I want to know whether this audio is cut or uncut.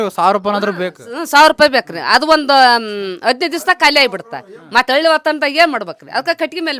uncut